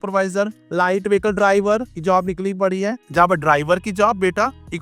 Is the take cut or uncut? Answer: cut